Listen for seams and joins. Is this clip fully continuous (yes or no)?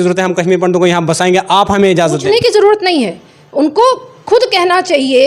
yes